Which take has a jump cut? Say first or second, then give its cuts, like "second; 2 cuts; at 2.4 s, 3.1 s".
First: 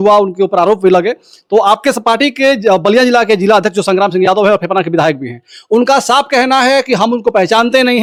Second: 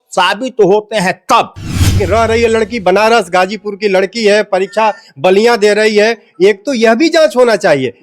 second; 1 cut; at 2.0 s